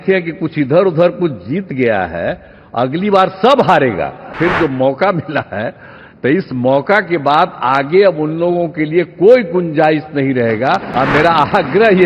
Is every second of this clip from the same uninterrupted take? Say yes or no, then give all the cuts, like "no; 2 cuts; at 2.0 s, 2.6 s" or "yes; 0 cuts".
no; 2 cuts; at 4.3 s, 10.9 s